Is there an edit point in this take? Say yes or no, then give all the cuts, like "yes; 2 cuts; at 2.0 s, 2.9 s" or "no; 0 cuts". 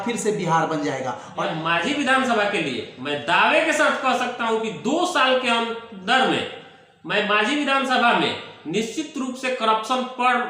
yes; 1 cut; at 1.5 s